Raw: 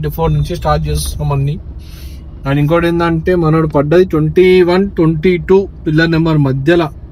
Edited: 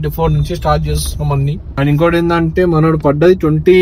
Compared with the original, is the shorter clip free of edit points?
no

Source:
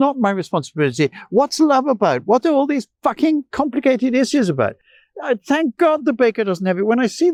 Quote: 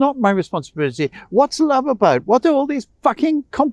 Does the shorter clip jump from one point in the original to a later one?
no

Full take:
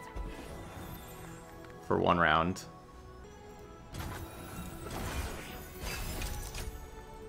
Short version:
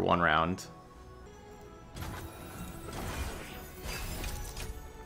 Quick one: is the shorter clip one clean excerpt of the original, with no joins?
yes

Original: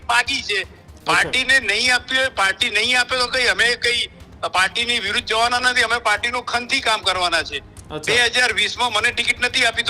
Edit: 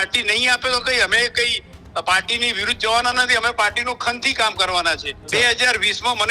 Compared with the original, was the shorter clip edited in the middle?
yes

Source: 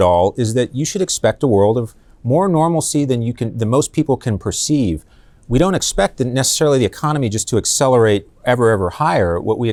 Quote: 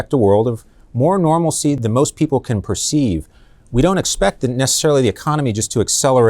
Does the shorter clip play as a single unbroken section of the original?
no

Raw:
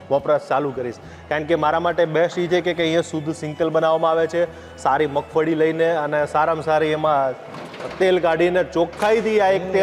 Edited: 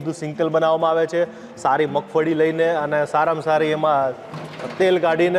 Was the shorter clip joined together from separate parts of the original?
no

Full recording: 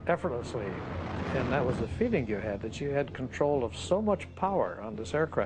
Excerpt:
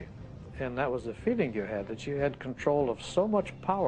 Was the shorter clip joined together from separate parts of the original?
no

